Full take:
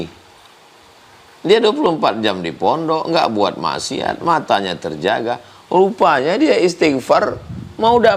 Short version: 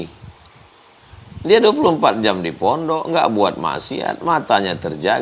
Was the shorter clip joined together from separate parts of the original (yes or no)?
no